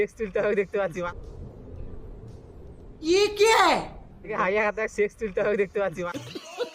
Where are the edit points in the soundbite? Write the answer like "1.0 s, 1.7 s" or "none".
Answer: 0.9 s, 4.3 s, 5.9 s